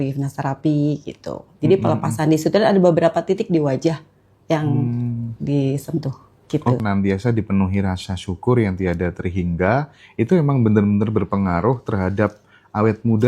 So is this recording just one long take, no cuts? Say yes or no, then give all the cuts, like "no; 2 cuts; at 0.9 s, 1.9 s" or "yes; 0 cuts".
no; 1 cut; at 6.8 s